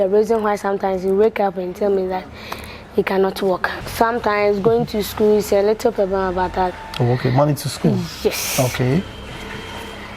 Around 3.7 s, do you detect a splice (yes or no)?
yes